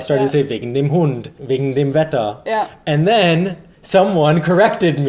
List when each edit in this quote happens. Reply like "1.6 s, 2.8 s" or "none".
1.3 s